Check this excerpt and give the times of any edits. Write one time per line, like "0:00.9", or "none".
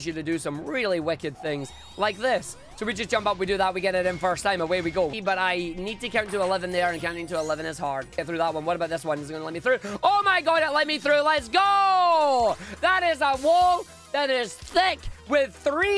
0:05.1
0:08.2